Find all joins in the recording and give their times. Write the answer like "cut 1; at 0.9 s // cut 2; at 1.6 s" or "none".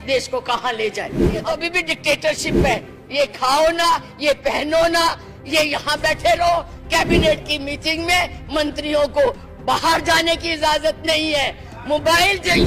cut 1; at 1.5 s